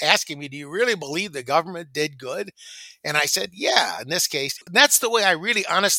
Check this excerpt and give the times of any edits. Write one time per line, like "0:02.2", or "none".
0:04.5